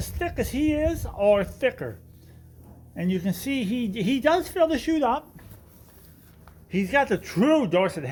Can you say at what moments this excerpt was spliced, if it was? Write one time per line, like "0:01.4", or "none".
none